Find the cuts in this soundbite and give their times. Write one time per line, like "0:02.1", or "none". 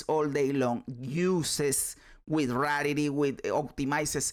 none